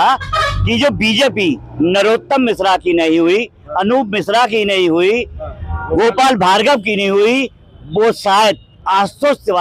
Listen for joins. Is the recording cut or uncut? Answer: uncut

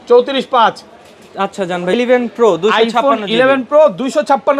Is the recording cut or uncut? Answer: cut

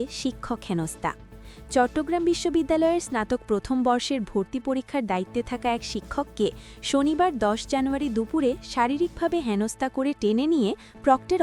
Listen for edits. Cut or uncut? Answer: uncut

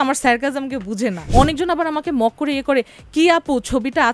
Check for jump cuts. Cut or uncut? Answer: cut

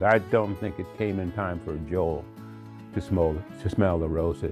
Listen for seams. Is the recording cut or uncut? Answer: uncut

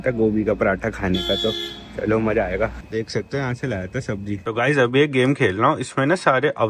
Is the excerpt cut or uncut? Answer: uncut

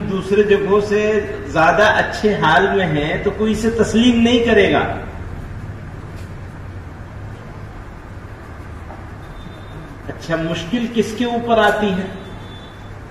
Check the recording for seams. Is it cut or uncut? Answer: uncut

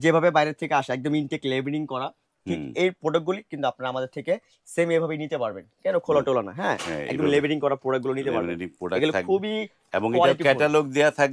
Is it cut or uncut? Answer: uncut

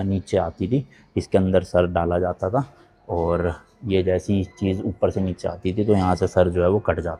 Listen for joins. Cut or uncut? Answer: uncut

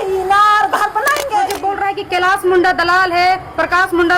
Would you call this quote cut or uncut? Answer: cut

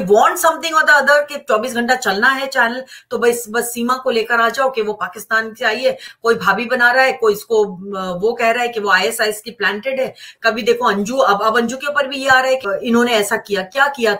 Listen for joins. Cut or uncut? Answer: cut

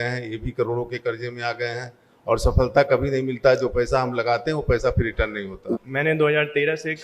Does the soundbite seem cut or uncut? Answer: cut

